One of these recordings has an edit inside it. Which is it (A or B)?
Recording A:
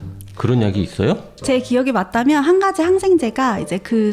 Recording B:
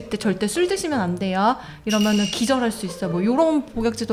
A